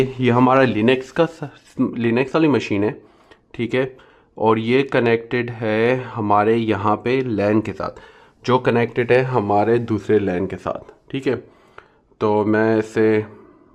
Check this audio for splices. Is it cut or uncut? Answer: uncut